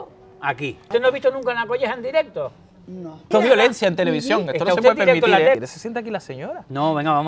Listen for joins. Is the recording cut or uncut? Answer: cut